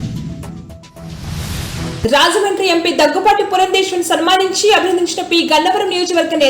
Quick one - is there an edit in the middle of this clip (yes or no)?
yes